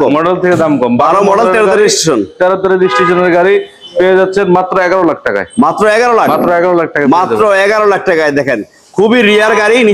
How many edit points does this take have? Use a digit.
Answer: 0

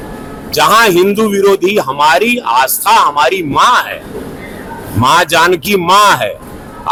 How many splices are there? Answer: 0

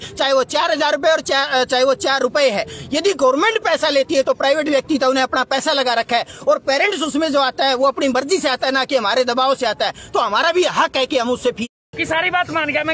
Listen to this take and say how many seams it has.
1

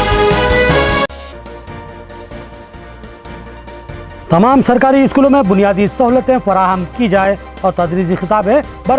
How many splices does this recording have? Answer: 1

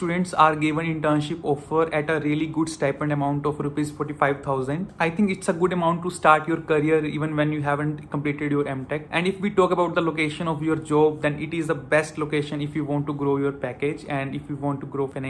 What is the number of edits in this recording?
0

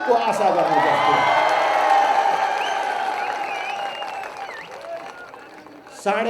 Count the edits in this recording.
0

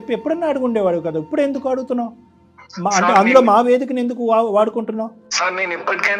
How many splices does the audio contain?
1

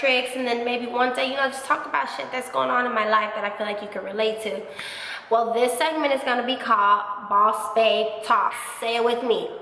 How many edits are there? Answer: 1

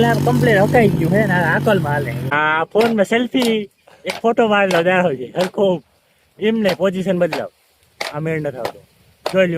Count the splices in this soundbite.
1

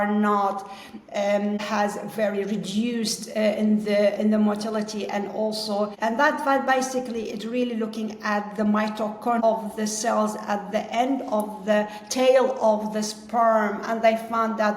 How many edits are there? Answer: 3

